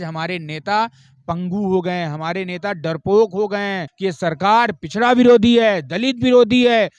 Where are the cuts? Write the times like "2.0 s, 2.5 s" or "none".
3.9 s